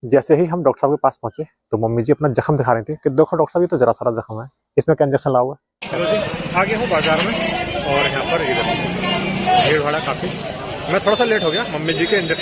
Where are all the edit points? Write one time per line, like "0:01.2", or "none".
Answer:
0:05.7